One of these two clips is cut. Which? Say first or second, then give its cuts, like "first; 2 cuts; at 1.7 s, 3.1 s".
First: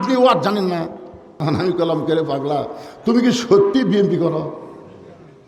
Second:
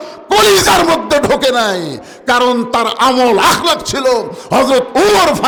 first; 1 cut; at 1.4 s